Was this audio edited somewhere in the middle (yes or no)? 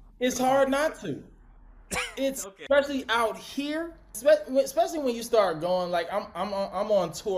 yes